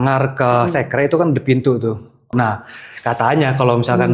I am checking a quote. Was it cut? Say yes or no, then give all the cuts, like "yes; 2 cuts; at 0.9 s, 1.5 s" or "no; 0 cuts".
yes; 1 cut; at 2.3 s